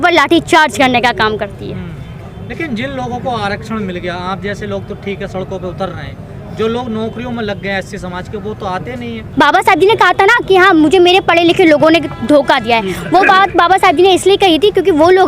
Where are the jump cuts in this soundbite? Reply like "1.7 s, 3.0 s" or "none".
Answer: none